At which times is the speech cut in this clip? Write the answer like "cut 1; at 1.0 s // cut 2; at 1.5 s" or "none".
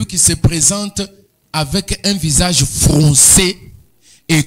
none